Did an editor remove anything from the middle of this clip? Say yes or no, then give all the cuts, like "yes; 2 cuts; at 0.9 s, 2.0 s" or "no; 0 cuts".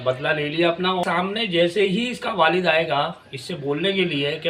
yes; 1 cut; at 1.0 s